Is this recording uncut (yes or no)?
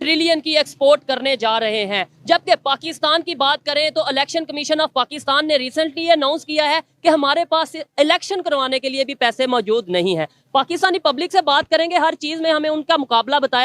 yes